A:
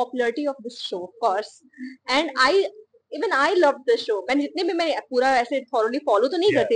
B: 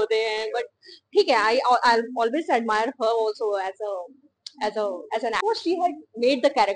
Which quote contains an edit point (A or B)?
B